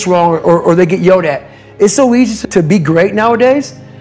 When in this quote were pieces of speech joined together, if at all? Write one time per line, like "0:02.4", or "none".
0:02.4